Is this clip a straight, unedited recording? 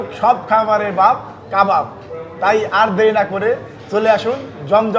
yes; 0 cuts

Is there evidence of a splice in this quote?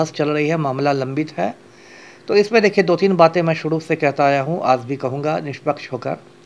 no; 0 cuts

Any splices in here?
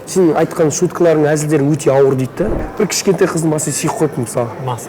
yes; 1 cut; at 2.6 s

